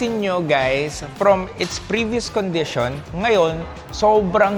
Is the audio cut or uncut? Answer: uncut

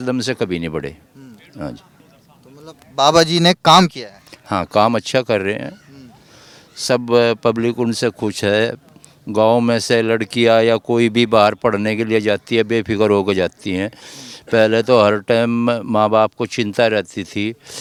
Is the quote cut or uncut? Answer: uncut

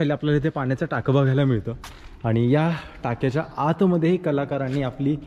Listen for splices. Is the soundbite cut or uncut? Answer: uncut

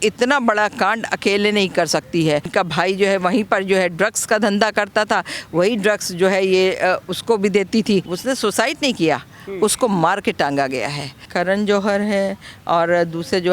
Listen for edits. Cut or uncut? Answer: cut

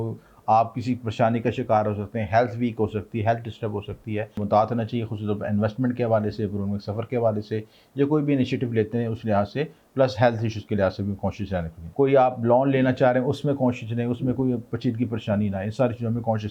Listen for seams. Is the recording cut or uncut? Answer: cut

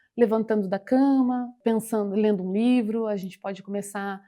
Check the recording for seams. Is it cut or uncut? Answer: cut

